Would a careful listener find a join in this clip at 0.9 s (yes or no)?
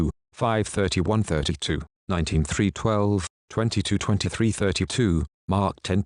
yes